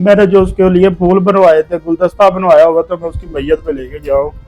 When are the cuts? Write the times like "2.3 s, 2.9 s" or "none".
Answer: none